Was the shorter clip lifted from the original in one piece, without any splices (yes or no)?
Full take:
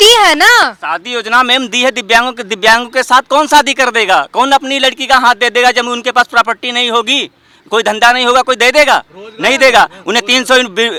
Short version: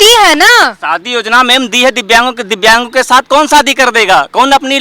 yes